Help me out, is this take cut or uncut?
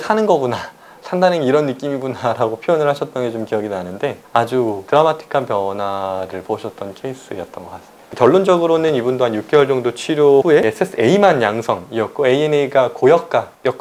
uncut